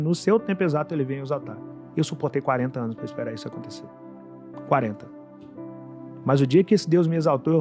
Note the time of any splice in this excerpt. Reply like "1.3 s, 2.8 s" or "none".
none